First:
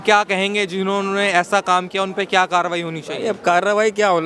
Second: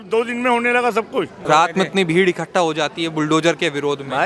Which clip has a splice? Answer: second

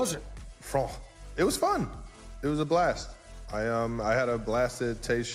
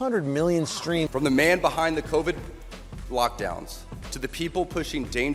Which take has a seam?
second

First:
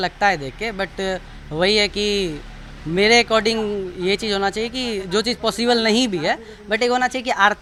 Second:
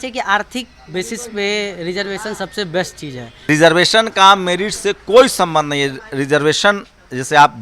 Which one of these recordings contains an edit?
second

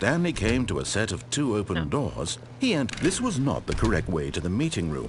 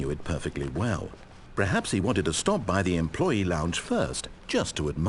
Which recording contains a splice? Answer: first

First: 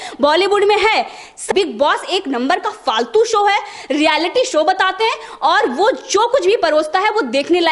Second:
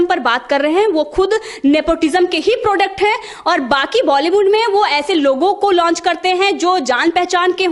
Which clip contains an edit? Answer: first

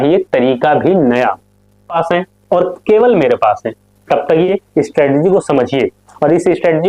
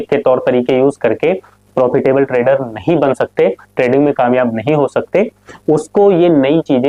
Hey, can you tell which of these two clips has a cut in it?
first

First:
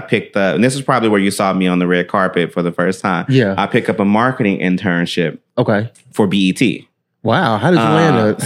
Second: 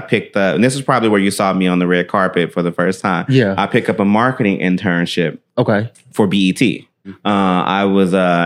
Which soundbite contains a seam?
second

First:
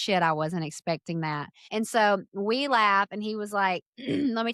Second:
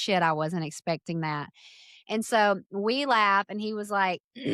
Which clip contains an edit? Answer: first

